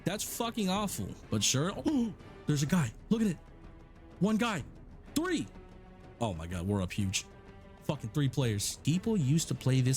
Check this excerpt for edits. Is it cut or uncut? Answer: cut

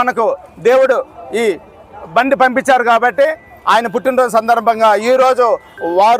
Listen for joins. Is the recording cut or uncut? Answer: uncut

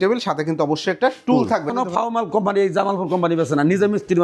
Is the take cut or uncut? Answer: cut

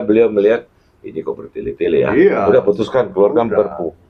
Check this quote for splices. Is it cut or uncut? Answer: uncut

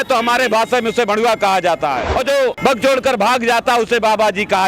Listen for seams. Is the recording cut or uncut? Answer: cut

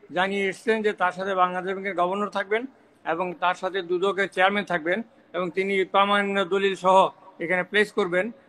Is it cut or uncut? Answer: uncut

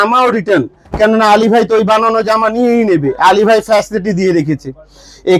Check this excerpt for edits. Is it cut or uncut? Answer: uncut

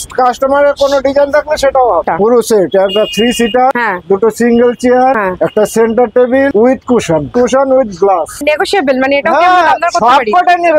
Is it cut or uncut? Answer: cut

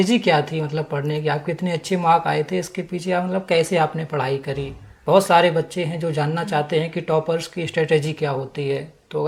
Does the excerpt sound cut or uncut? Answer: uncut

